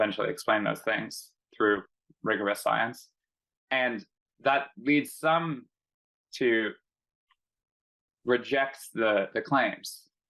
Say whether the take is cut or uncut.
uncut